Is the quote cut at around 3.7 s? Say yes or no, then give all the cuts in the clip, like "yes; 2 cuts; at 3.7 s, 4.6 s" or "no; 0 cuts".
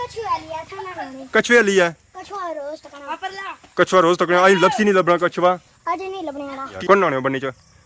no; 3 cuts; at 1.3 s, 2.1 s, 6.7 s